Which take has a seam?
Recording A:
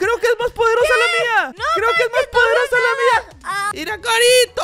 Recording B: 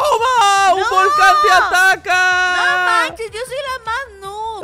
A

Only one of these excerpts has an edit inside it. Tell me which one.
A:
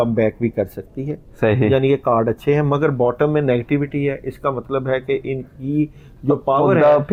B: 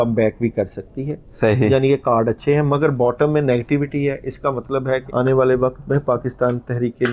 B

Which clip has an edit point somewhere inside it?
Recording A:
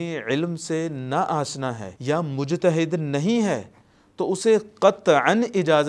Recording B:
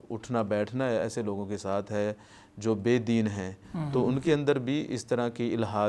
A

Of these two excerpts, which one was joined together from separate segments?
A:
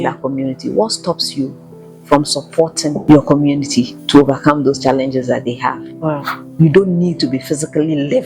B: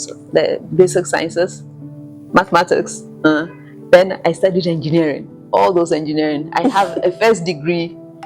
A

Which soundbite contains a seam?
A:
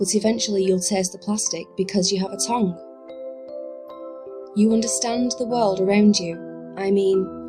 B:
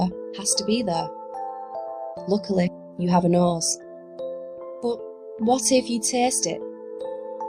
A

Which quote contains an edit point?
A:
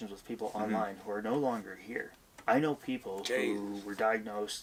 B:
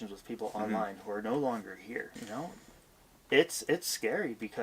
B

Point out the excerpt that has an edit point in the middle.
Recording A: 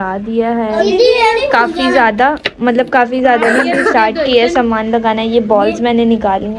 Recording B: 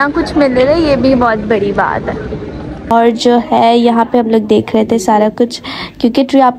B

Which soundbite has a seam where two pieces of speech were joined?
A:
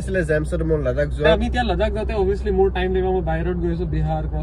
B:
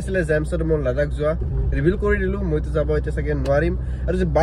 A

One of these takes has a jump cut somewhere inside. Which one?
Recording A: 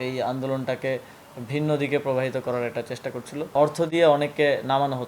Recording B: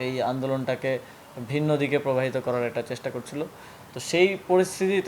A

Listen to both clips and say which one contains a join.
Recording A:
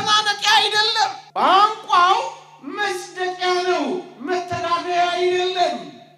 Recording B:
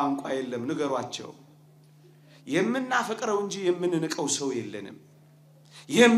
A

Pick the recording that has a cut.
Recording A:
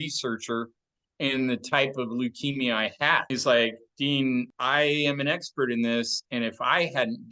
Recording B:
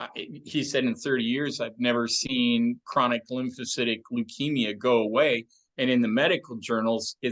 A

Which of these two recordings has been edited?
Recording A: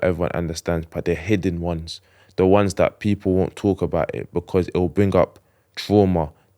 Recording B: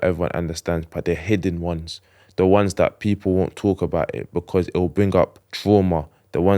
B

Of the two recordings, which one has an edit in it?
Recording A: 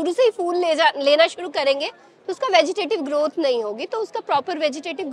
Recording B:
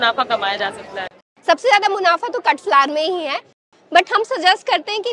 B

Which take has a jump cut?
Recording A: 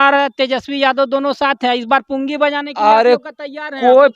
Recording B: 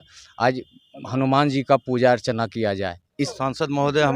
B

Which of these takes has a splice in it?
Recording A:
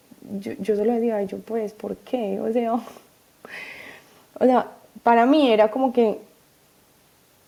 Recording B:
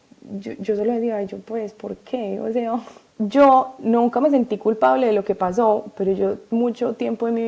B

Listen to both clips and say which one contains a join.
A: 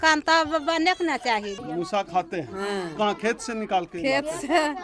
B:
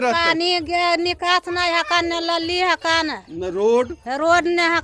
A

